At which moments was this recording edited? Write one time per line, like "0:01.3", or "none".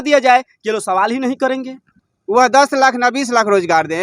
0:02.0